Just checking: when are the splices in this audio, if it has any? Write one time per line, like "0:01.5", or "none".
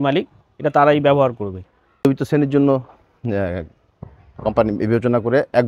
0:01.5